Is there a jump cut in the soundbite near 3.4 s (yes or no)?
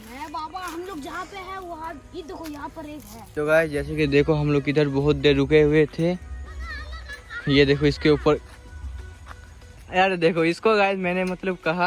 yes